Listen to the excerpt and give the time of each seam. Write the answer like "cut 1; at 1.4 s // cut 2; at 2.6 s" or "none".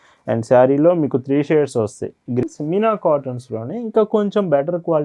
cut 1; at 2.4 s